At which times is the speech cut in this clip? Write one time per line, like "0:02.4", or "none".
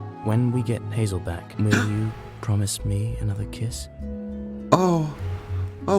0:01.4